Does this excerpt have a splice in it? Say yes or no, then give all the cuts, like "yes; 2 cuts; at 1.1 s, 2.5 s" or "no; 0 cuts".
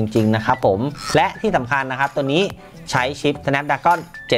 yes; 1 cut; at 1.0 s